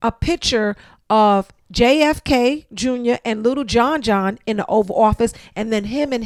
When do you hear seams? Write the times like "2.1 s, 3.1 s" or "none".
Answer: none